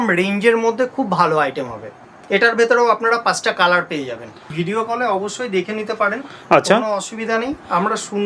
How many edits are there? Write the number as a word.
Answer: one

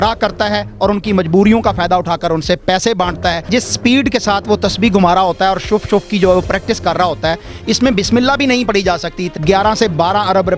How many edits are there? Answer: two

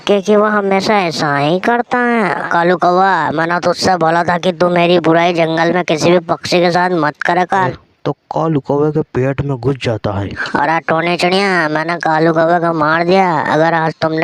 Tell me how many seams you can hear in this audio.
three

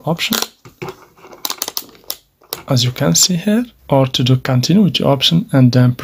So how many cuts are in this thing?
one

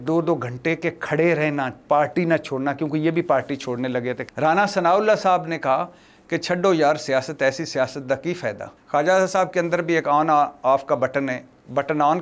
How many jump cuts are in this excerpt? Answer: two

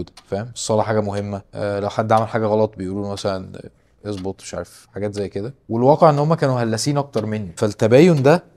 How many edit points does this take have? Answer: one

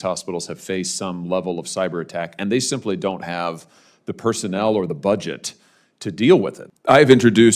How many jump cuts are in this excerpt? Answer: one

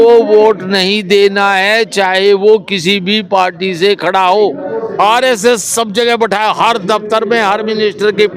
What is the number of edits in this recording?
one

